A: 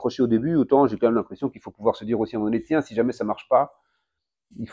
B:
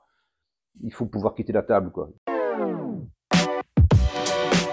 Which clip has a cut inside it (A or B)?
B